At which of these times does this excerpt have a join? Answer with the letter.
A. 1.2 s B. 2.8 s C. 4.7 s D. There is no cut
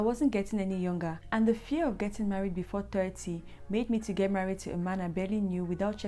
A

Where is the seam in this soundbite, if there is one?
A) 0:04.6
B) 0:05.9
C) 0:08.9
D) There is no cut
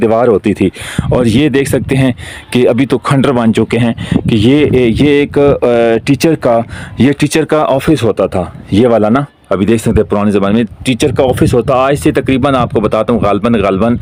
D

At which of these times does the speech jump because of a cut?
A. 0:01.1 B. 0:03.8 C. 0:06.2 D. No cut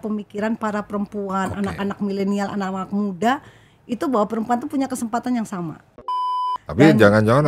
C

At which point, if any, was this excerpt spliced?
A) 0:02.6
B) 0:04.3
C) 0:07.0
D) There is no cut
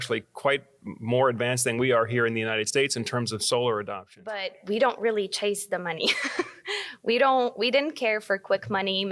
B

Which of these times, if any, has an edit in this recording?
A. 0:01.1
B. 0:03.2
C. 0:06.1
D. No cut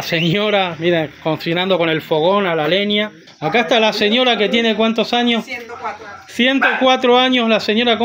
B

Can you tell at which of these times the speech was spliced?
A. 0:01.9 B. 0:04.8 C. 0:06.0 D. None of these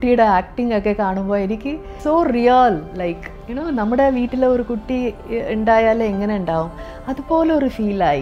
A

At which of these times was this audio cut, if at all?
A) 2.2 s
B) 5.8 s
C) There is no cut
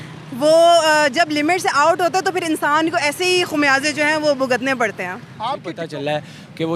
B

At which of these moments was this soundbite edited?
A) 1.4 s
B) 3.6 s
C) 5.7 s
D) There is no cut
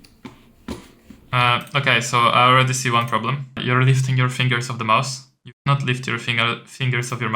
B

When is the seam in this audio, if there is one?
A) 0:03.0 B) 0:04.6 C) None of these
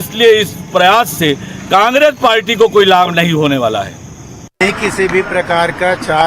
B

